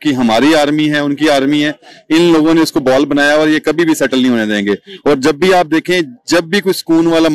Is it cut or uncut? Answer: uncut